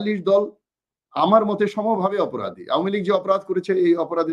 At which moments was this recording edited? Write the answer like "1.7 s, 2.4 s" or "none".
none